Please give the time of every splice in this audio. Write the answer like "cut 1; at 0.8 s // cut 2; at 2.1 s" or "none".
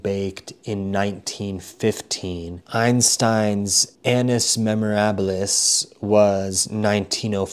cut 1; at 2.6 s // cut 2; at 3.8 s

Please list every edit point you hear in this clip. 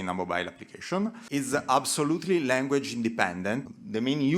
cut 1; at 1.2 s // cut 2; at 3.6 s

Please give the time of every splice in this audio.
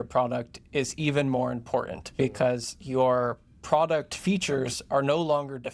none

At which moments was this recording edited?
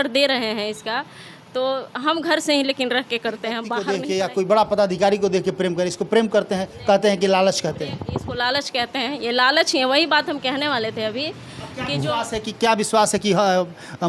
cut 1; at 3.7 s

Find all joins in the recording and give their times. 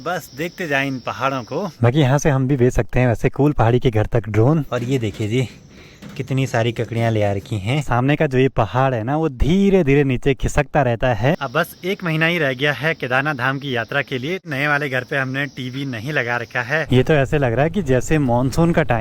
cut 1; at 1.8 s // cut 2; at 4.6 s // cut 3; at 7.8 s // cut 4; at 11.3 s // cut 5; at 14.5 s // cut 6; at 16.8 s

